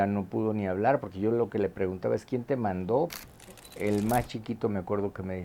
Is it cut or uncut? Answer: cut